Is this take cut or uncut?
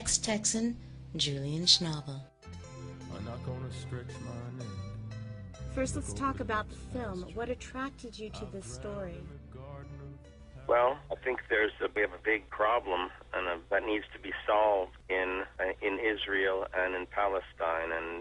cut